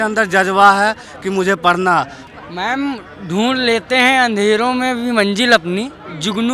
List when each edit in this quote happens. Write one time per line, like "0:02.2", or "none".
0:02.2